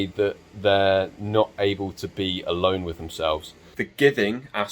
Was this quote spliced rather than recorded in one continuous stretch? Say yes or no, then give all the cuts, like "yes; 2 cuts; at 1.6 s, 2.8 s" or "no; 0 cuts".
yes; 1 cut; at 3.8 s